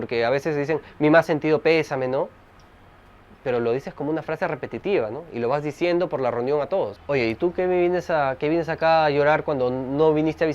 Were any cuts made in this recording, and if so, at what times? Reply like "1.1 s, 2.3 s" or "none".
7.0 s